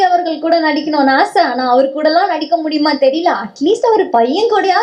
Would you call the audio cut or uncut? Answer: uncut